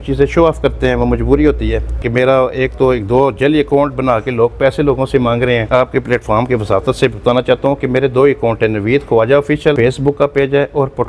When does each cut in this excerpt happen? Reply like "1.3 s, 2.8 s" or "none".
2.0 s, 5.7 s, 9.8 s